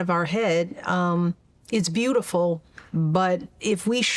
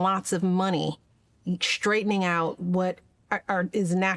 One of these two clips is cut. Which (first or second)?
first